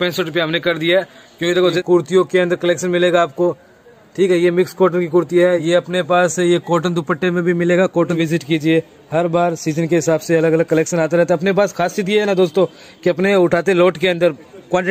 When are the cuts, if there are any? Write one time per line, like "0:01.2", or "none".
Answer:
0:01.8
0:05.6
0:08.2